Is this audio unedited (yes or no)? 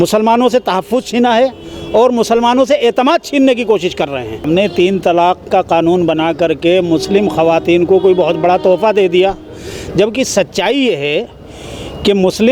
no